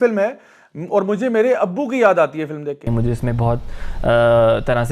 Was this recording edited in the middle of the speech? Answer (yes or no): yes